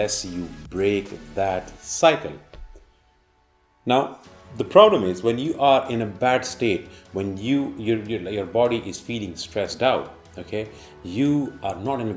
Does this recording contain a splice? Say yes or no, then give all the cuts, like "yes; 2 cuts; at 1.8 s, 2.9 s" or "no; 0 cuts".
no; 0 cuts